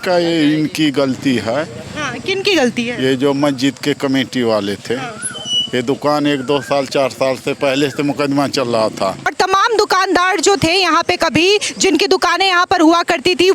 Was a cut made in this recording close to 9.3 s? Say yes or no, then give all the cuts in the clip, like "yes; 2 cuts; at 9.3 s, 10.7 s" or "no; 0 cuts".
yes; 1 cut; at 9.3 s